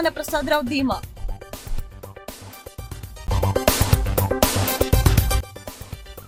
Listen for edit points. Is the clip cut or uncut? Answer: uncut